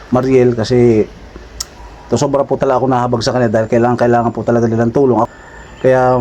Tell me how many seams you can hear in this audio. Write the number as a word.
one